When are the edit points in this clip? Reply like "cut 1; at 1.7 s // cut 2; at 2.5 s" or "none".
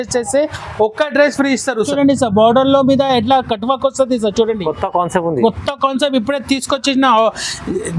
cut 1; at 1.9 s